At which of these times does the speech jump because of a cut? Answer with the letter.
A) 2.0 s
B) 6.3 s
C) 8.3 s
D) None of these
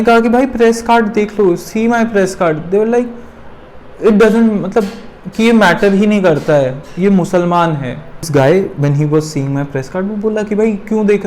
C